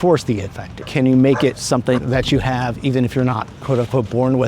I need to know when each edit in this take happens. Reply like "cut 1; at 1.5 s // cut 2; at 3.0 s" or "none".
cut 1; at 1.9 s